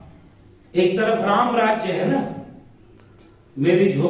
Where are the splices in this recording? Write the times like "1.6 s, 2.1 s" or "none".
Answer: none